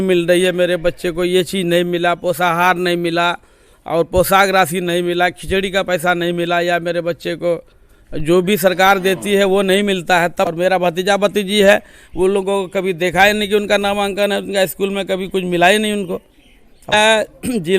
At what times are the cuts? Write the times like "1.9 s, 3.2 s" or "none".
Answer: 10.5 s, 16.9 s